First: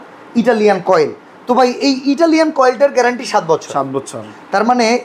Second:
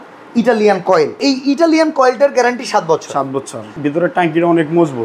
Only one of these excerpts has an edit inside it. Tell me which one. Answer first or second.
second